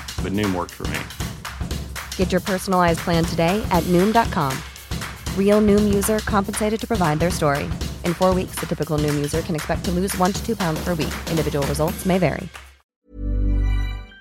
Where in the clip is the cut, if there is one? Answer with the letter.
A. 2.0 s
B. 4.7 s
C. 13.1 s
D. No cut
C